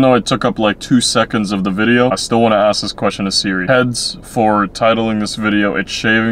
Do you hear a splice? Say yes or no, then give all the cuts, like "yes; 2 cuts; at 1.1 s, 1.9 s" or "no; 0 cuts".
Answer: yes; 1 cut; at 2.2 s